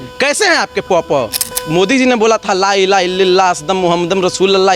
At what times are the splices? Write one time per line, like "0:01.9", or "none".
0:01.5